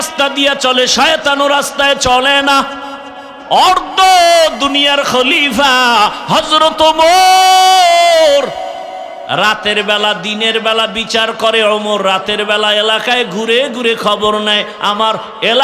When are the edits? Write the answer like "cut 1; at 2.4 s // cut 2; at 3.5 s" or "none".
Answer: cut 1; at 3.3 s // cut 2; at 9.2 s